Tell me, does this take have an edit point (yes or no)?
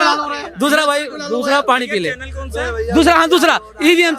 no